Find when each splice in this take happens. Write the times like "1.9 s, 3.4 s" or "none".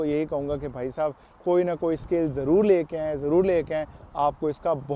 none